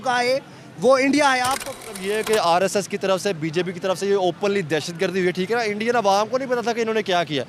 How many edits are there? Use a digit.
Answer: 1